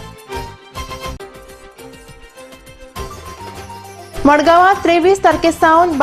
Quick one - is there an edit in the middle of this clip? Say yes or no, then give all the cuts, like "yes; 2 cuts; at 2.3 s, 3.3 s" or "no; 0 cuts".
no; 0 cuts